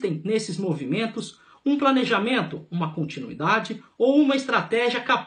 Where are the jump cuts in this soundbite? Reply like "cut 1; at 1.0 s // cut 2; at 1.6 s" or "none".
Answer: cut 1; at 2.4 s

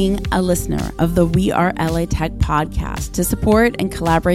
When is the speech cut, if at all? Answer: none

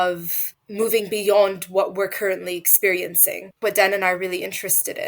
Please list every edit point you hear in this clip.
cut 1; at 3.5 s

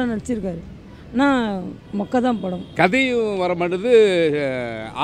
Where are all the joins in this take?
cut 1; at 2.6 s

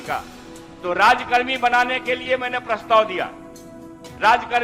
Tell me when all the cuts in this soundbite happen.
none

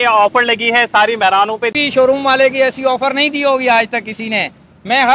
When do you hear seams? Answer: cut 1; at 1.7 s

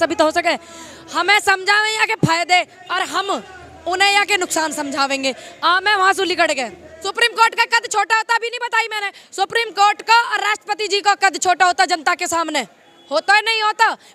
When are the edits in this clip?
cut 1; at 6.8 s

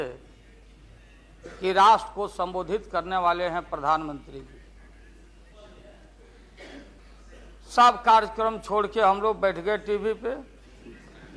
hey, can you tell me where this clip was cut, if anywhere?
cut 1; at 7.0 s

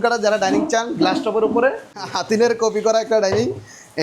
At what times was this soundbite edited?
cut 1; at 2.1 s

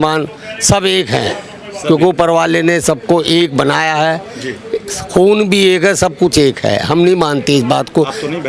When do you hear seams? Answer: none

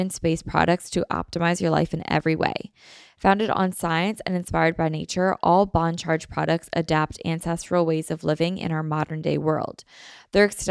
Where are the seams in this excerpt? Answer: none

